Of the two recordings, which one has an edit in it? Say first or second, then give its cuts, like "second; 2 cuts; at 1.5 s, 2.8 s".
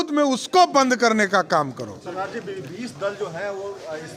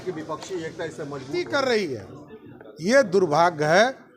second; 1 cut; at 1.3 s